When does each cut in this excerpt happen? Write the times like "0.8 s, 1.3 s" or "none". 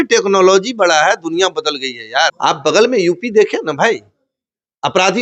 2.4 s